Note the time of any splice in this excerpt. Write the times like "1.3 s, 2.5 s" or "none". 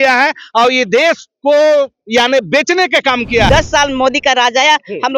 3.5 s